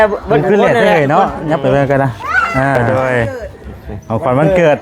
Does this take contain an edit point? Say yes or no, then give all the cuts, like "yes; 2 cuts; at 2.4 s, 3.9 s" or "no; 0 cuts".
yes; 1 cut; at 2.8 s